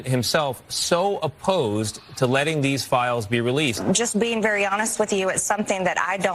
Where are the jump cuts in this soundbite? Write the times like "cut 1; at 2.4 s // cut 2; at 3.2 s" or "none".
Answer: cut 1; at 3.8 s